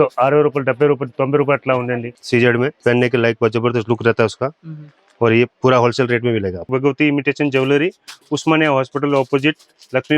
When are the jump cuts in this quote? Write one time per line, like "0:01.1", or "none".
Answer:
0:02.4
0:05.5
0:06.6